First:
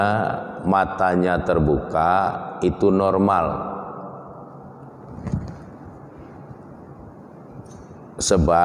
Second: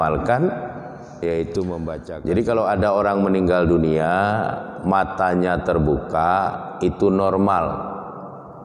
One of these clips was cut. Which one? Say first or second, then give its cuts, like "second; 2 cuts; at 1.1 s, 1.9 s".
second; 1 cut; at 2.1 s